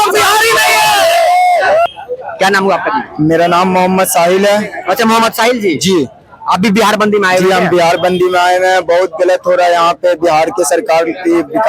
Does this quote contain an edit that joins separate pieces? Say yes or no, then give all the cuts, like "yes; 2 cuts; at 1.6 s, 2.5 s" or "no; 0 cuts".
yes; 1 cut; at 1.9 s